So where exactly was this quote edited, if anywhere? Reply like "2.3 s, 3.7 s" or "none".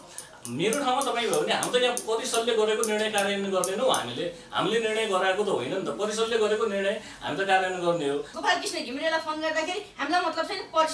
8.3 s